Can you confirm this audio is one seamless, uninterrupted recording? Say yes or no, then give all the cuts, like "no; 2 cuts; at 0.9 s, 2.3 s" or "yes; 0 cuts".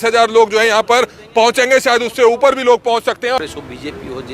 no; 1 cut; at 3.4 s